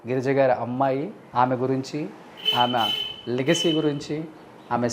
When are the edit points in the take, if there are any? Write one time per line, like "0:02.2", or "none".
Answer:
0:01.2